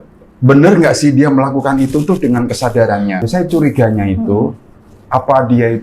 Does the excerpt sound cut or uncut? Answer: cut